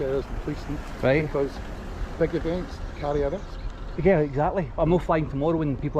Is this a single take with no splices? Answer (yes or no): yes